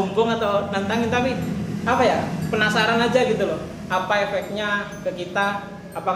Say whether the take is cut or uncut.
uncut